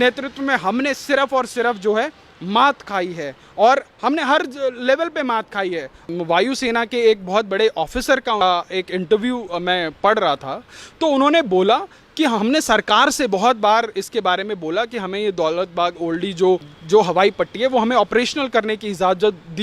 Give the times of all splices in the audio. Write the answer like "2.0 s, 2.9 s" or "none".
6.1 s